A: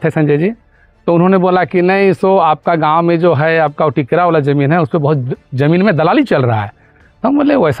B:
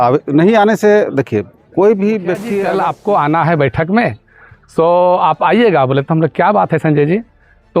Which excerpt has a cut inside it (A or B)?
B